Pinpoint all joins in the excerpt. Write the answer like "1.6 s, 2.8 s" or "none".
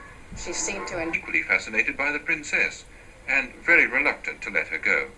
none